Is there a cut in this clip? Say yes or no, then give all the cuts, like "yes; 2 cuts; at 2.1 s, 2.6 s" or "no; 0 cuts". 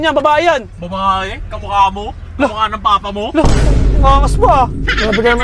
no; 0 cuts